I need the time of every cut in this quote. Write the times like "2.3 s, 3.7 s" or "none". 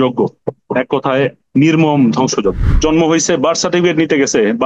1.4 s, 2.7 s